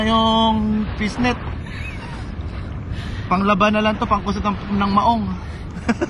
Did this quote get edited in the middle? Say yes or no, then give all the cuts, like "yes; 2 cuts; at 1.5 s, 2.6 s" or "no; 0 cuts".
no; 0 cuts